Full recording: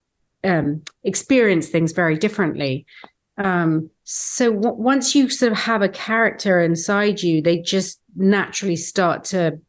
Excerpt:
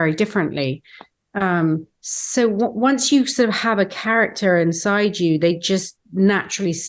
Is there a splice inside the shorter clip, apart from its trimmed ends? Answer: no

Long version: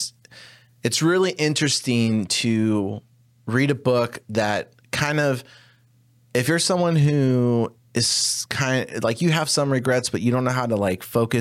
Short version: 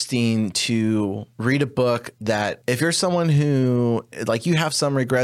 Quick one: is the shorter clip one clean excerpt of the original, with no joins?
no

